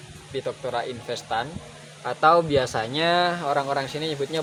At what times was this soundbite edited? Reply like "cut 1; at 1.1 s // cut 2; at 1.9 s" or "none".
none